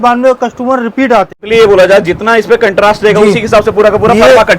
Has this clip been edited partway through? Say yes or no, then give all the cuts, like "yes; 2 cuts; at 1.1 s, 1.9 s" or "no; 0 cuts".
yes; 1 cut; at 1.4 s